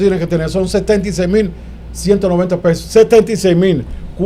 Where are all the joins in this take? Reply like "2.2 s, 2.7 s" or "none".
none

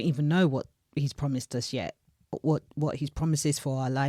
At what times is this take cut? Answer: 2.3 s

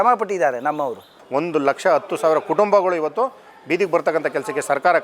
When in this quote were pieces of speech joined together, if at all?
1.2 s

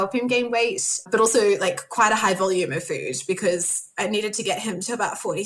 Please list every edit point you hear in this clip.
none

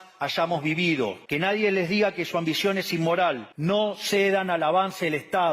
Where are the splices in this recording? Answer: 1.2 s, 3.5 s

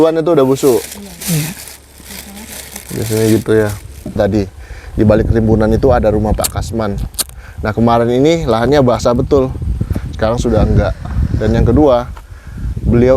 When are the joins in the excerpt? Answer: 4.1 s

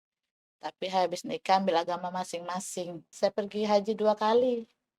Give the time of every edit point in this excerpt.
3.1 s

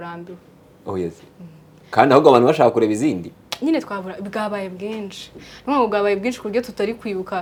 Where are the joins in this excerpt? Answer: none

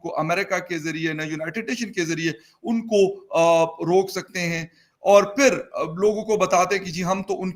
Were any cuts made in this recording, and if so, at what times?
none

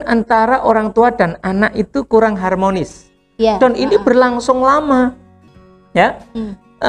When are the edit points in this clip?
none

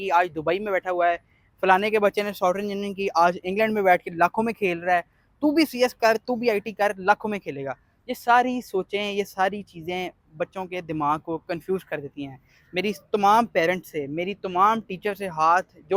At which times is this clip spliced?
none

